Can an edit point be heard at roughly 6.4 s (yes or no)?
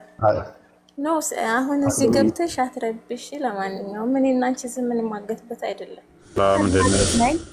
yes